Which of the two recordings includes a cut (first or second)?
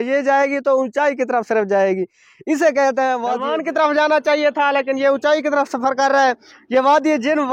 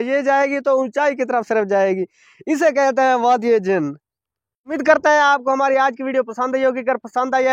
first